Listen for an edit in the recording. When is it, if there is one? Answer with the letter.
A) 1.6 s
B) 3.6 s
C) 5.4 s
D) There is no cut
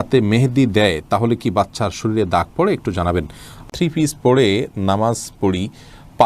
B